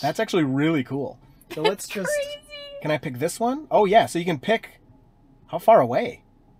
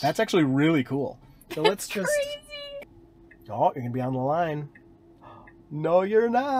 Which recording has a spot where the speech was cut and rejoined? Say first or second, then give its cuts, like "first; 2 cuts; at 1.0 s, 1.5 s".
second; 1 cut; at 2.7 s